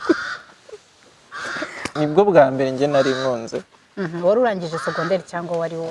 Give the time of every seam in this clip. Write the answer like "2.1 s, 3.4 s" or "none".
1.9 s